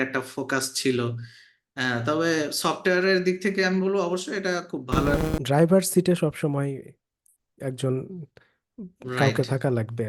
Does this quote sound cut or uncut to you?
cut